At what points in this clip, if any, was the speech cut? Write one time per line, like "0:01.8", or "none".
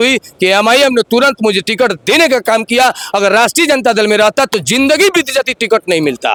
none